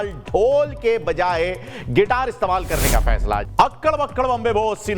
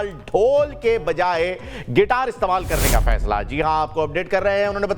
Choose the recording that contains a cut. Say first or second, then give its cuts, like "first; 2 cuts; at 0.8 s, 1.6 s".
first; 1 cut; at 3.5 s